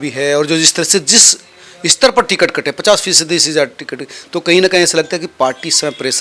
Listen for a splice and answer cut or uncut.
uncut